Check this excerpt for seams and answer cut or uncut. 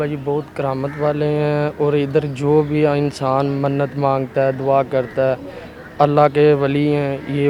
uncut